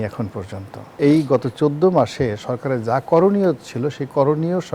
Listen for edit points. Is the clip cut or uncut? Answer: cut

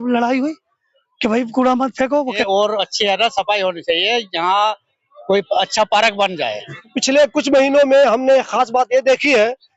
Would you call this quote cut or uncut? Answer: cut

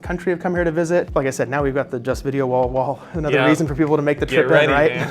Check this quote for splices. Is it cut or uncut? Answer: cut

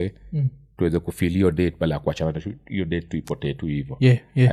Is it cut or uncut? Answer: uncut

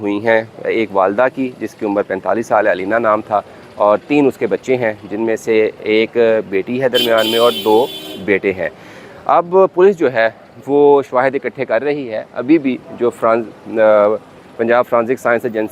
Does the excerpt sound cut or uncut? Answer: uncut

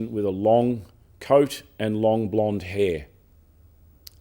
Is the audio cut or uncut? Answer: uncut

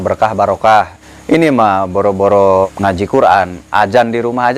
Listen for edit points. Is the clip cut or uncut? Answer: cut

